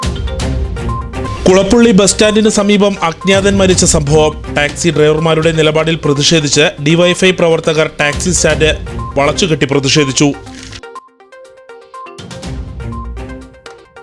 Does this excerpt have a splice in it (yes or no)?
yes